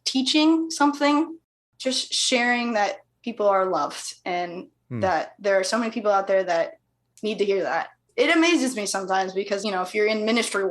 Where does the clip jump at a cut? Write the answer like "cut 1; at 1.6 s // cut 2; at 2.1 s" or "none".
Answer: cut 1; at 1.4 s